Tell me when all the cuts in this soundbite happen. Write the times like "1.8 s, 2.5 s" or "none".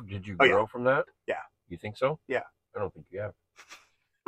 none